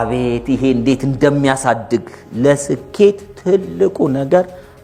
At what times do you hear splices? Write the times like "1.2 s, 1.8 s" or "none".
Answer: none